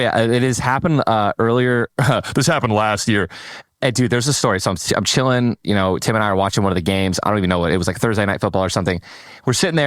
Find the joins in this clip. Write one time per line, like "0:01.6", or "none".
0:03.6